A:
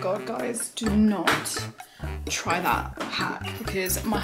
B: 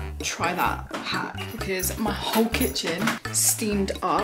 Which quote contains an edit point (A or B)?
B